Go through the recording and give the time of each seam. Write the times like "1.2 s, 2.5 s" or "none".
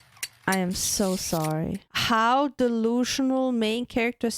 1.9 s